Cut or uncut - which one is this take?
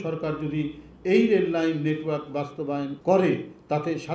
cut